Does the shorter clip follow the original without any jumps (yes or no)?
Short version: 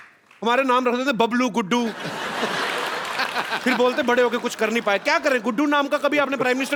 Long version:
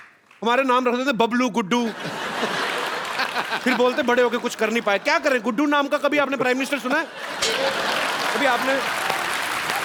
yes